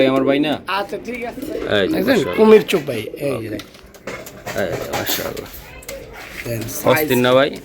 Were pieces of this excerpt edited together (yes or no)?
yes